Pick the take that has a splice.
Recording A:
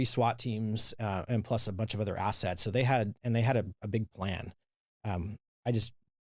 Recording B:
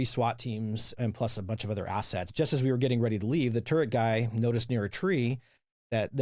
B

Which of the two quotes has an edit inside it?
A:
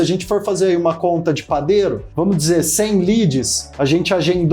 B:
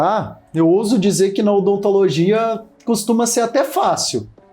A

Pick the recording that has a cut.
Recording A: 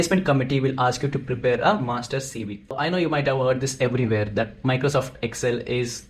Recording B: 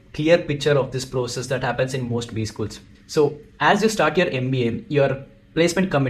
A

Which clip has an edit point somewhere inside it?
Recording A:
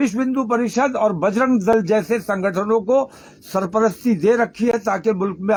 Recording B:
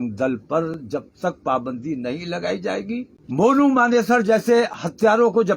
B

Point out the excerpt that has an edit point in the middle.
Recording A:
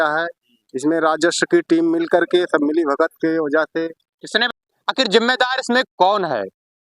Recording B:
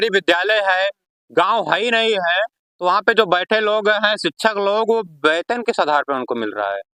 A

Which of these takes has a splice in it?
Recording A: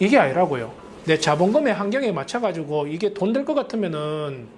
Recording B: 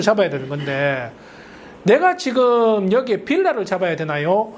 A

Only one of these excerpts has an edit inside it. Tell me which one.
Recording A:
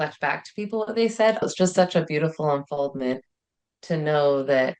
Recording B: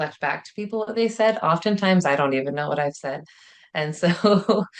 A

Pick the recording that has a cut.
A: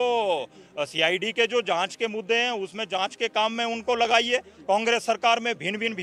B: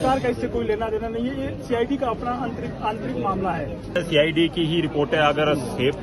B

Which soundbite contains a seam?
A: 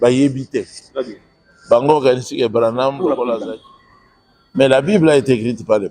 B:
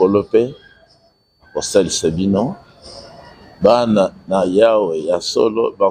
A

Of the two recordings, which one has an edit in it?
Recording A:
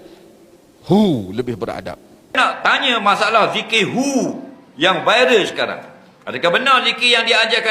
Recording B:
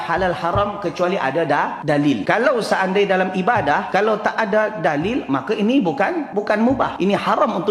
A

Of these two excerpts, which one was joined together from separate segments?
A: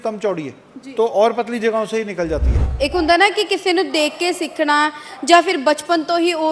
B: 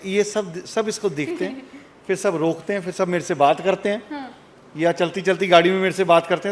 A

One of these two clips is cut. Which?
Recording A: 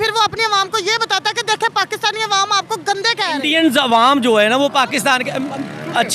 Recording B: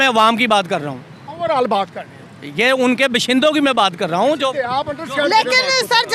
A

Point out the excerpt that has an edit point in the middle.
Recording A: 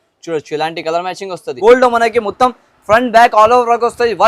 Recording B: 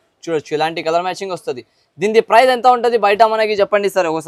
A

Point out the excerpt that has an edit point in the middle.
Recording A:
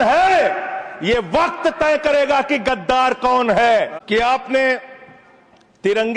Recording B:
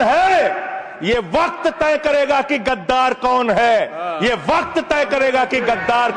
A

